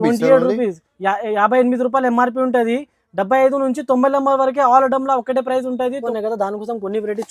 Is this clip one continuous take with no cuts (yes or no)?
no